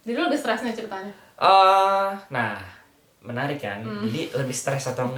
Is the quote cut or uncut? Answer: uncut